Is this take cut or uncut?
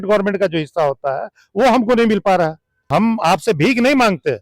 cut